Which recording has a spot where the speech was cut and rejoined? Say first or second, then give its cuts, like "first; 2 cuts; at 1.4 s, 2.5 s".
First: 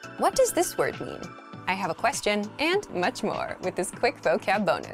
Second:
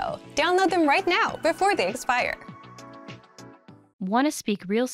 second; 1 cut; at 3.8 s